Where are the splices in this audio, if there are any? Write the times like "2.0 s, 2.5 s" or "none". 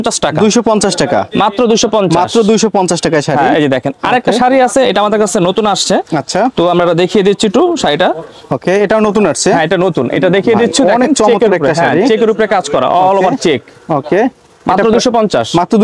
none